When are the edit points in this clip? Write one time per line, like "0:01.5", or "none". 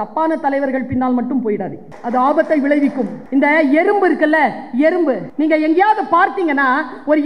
0:01.9
0:03.1
0:05.3